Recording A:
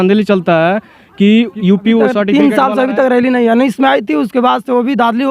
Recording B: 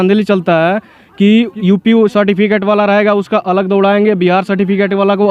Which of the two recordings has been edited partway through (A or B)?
A